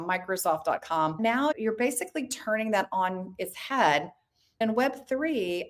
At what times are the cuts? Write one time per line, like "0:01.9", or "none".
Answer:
0:01.2
0:04.6